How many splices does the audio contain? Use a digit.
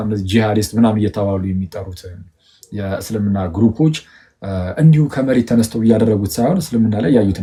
0